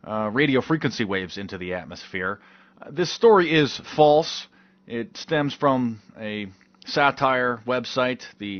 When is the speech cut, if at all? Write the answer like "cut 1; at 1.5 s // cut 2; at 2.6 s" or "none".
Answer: cut 1; at 5.1 s